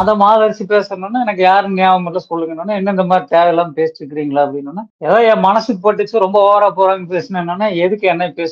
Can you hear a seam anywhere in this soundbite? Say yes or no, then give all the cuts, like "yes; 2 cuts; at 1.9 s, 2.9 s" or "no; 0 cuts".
no; 0 cuts